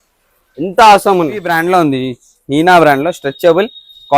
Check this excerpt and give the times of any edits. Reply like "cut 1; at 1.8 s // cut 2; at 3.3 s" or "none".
cut 1; at 1.5 s